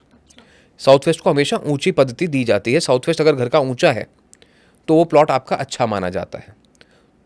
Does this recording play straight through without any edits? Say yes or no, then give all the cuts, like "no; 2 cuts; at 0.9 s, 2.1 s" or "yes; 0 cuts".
yes; 0 cuts